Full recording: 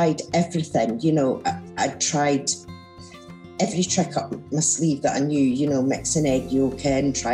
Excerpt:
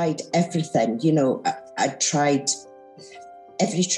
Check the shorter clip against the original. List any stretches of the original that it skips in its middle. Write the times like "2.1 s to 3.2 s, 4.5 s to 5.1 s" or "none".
none